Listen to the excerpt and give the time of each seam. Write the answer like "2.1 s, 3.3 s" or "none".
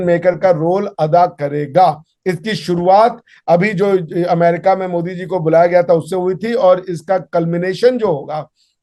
none